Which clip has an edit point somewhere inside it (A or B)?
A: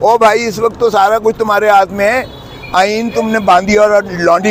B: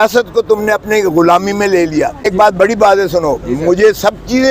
B